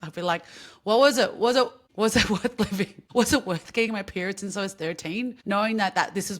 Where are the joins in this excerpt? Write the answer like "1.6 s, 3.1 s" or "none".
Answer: 1.9 s, 3.0 s, 5.4 s